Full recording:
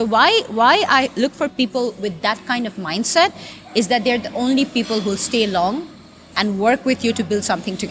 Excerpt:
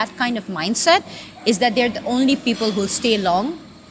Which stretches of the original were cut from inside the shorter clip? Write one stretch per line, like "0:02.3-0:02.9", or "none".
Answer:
none